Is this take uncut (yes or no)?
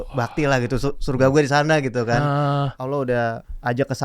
no